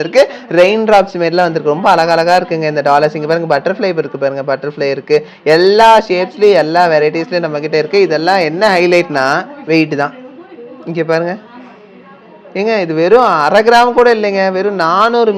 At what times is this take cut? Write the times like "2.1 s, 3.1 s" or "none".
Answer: none